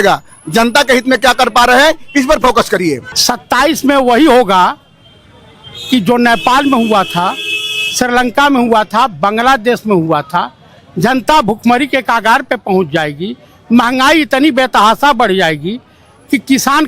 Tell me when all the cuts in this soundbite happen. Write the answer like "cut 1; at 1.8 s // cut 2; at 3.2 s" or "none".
cut 1; at 3.1 s